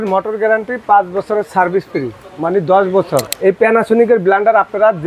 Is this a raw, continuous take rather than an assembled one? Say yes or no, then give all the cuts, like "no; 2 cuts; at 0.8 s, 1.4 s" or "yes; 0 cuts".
no; 1 cut; at 3.3 s